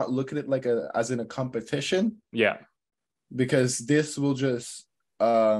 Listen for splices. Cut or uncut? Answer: uncut